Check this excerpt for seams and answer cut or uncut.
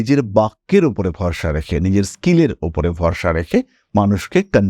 uncut